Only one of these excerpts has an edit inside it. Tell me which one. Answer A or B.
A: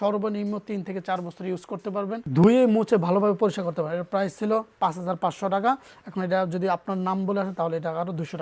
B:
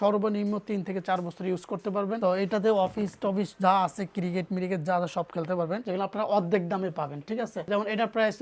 B